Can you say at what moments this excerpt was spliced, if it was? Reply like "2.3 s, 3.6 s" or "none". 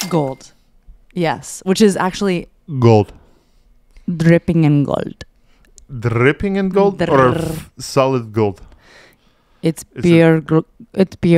none